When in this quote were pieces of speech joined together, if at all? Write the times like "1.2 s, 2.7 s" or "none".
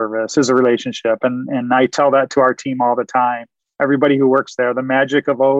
none